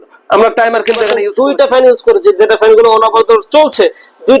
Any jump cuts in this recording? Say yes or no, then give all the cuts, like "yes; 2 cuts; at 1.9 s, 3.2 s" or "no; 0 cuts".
yes; 1 cut; at 1.2 s